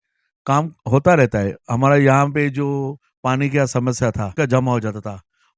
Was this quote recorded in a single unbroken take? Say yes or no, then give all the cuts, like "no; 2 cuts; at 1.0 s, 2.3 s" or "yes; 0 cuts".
no; 1 cut; at 4.3 s